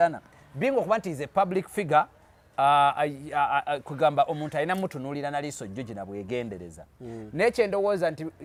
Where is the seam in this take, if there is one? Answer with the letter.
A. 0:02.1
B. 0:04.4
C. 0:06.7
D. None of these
D